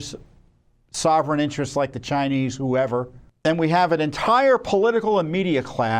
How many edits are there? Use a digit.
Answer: 1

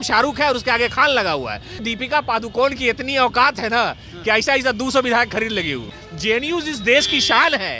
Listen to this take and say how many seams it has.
2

